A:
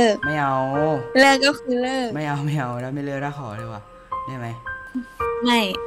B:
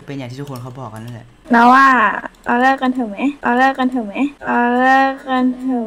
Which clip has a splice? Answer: B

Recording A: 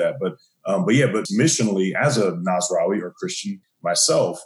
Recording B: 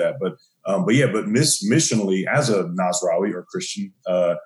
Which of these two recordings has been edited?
A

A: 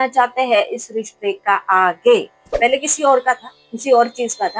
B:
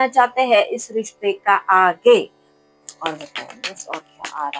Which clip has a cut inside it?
A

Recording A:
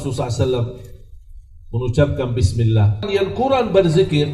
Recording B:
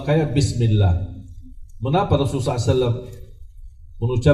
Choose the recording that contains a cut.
A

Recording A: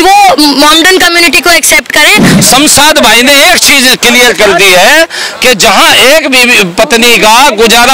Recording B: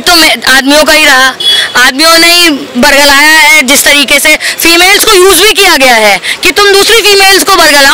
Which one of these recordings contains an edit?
A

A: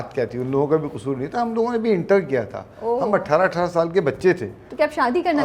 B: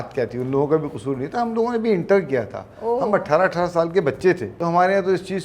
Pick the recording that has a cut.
B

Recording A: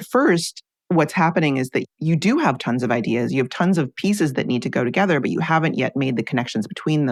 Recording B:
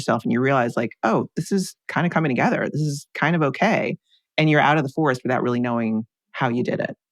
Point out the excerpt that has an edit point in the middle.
B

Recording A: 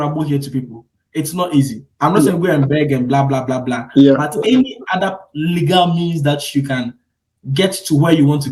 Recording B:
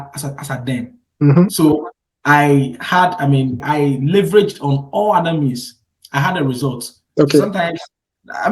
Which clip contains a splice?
B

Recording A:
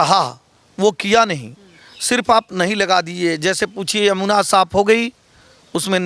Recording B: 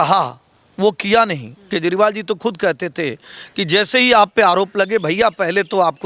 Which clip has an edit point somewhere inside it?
B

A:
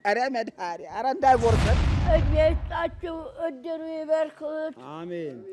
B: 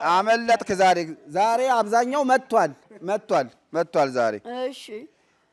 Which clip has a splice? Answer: A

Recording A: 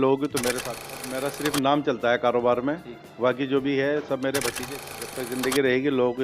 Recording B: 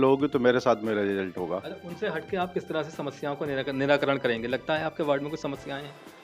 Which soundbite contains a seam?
A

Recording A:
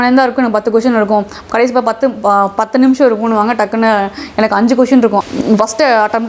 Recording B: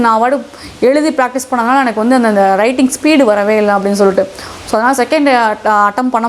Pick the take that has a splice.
A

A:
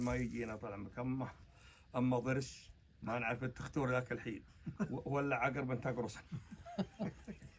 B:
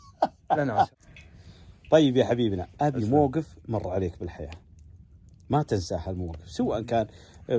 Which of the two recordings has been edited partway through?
B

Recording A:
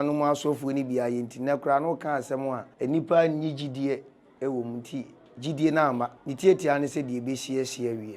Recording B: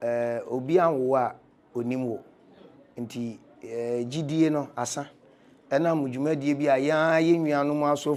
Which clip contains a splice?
A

